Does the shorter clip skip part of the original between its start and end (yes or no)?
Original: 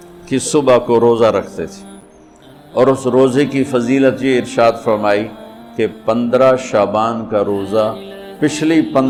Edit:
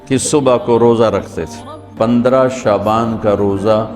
yes